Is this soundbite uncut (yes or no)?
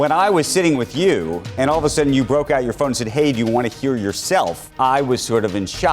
no